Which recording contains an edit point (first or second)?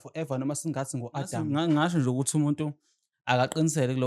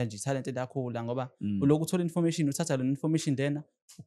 first